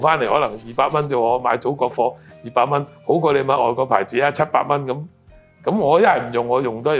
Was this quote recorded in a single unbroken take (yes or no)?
yes